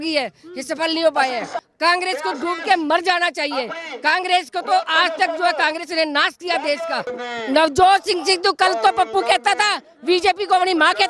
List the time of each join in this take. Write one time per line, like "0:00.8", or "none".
0:01.6
0:07.2